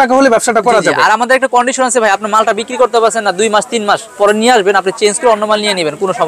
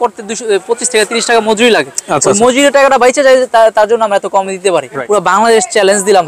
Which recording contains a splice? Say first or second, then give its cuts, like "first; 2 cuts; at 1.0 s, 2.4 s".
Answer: second; 1 cut; at 4.9 s